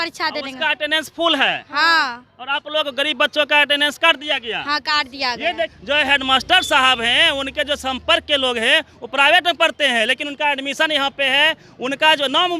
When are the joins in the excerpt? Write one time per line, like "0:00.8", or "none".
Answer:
0:05.8